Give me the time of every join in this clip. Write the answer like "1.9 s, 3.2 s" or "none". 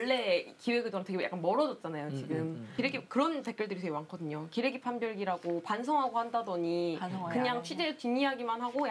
2.7 s